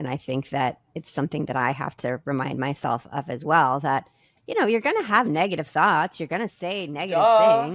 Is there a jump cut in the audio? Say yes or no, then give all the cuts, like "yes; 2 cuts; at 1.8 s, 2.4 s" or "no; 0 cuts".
no; 0 cuts